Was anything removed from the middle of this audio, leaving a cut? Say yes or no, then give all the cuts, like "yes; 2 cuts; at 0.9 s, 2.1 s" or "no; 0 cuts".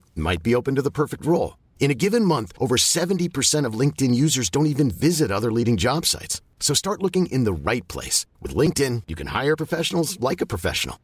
no; 0 cuts